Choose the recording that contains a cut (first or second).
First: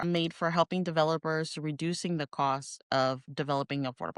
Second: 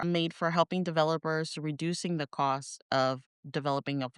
first